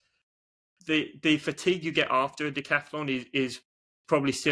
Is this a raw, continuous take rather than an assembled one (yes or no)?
yes